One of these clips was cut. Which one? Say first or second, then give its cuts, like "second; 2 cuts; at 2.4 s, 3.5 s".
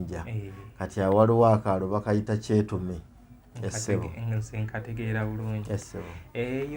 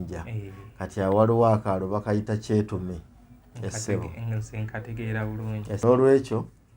second; 1 cut; at 5.8 s